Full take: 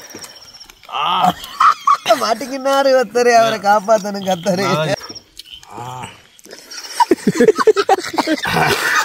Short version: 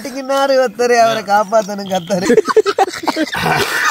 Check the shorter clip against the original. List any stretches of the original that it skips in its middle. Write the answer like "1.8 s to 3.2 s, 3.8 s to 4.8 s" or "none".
4.6 s to 7.3 s